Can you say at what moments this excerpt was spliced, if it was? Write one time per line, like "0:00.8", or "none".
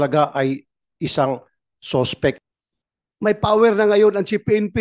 0:02.4